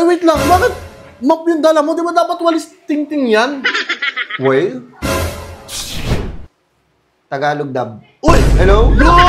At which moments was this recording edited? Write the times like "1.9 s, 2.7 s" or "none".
none